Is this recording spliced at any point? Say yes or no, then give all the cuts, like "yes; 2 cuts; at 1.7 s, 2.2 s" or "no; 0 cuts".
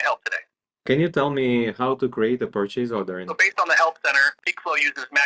yes; 3 cuts; at 0.9 s, 3.3 s, 4.3 s